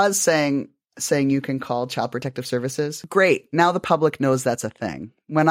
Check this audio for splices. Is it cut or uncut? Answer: cut